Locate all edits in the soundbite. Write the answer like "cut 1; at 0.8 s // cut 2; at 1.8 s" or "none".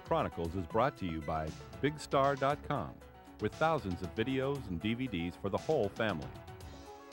cut 1; at 6.2 s